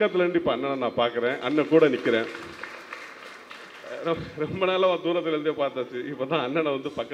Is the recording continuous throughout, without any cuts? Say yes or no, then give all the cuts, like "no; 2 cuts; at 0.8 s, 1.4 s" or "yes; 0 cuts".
yes; 0 cuts